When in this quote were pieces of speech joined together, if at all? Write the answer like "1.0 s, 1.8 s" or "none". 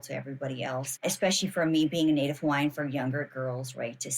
0.9 s